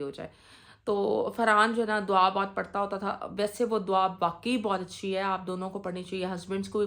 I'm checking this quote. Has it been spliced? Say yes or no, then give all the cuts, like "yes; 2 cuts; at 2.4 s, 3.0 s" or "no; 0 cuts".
no; 0 cuts